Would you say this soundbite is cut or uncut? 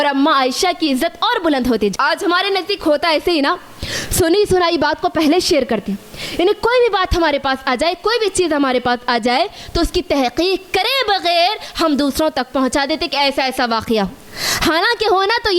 cut